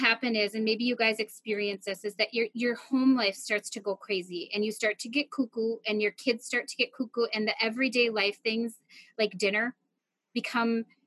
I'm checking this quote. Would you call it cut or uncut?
uncut